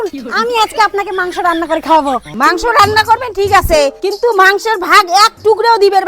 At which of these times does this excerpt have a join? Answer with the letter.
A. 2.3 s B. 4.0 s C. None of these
A